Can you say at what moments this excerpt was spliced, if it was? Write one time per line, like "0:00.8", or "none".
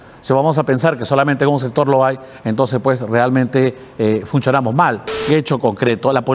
0:05.2